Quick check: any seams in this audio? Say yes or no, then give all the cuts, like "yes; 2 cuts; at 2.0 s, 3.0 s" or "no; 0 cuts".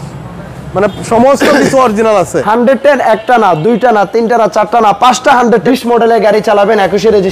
yes; 2 cuts; at 2.4 s, 5.7 s